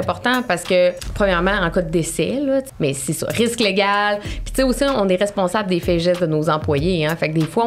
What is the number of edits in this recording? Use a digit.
2